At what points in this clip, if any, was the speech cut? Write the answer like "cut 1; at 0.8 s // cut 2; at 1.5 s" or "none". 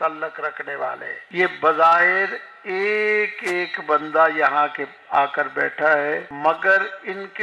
cut 1; at 1.1 s // cut 2; at 6.3 s